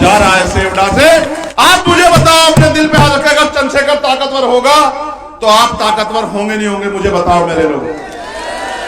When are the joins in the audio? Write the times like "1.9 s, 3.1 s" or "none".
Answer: 1.4 s